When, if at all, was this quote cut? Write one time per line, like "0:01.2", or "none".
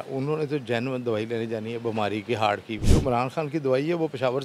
none